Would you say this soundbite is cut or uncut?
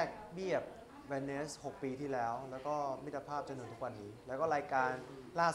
uncut